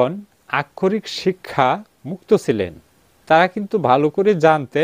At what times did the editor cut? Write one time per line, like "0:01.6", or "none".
0:03.1